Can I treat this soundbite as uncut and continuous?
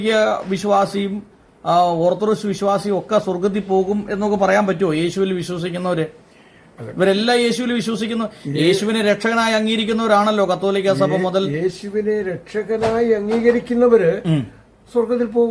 yes; 0 cuts

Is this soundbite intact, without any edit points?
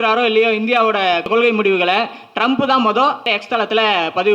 no; 2 cuts; at 1.3 s, 3.3 s

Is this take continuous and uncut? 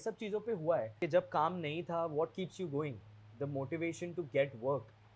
no; 1 cut; at 0.9 s

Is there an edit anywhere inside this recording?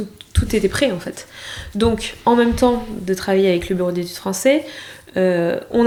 no; 0 cuts

